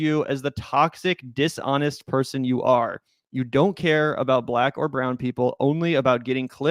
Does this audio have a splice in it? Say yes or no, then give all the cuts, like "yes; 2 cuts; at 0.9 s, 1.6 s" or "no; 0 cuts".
no; 0 cuts